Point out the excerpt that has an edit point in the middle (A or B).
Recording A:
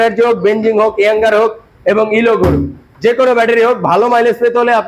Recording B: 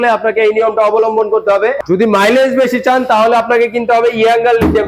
B